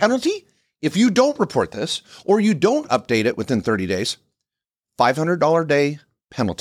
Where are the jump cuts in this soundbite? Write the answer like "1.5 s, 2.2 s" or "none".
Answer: none

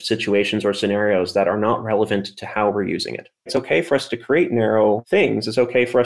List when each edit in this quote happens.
3.5 s, 5.0 s

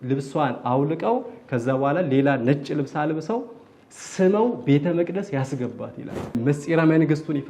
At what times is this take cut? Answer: 6.3 s

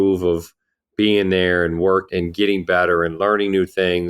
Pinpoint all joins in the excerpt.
2.1 s

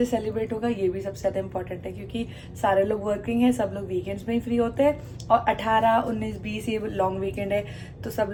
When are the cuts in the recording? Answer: none

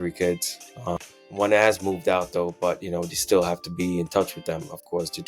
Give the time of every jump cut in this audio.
1.0 s

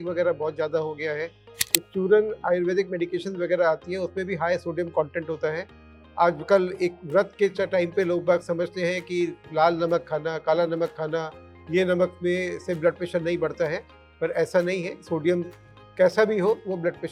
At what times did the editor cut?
none

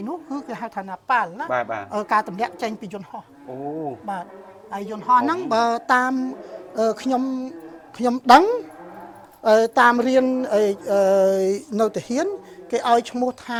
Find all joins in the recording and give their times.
none

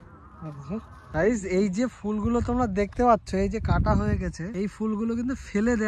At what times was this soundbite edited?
1.0 s, 4.4 s

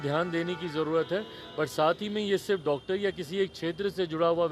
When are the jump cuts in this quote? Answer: none

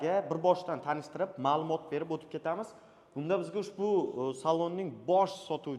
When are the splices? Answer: none

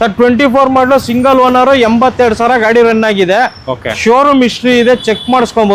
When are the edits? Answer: none

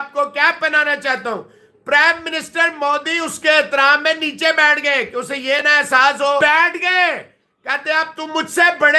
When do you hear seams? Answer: 6.4 s

